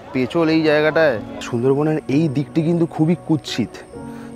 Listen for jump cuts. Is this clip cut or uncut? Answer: cut